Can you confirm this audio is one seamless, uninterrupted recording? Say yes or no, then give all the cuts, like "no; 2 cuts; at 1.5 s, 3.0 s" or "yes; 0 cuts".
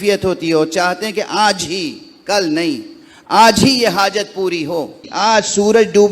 no; 1 cut; at 5.1 s